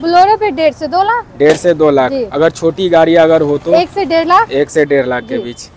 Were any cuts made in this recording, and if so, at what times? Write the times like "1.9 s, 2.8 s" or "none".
none